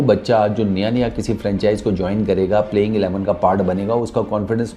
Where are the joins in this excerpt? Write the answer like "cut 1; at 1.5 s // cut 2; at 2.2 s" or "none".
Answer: none